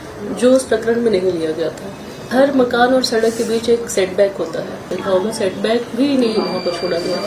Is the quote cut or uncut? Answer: cut